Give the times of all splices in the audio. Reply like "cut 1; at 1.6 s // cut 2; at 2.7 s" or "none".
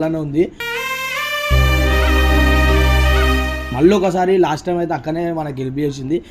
cut 1; at 3.7 s